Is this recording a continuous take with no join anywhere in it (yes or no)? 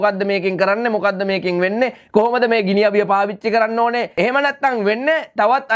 no